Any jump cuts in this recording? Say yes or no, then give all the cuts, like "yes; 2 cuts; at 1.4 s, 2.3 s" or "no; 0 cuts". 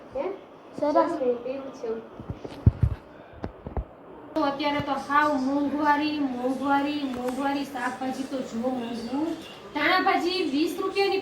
yes; 1 cut; at 4.4 s